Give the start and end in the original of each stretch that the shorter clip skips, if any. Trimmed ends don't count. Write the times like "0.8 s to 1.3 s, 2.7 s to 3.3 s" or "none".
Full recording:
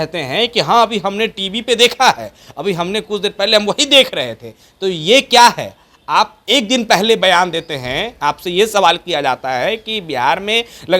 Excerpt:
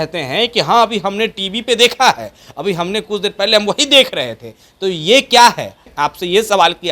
5.8 s to 8.1 s